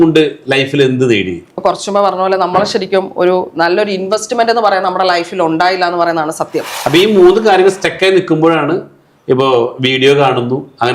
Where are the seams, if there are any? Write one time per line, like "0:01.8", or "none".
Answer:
0:01.5
0:06.7